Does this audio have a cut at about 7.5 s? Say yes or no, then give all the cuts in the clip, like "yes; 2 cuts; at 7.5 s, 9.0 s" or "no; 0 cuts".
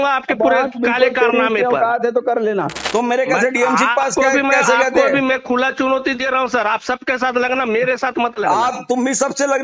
no; 1 cut; at 2.8 s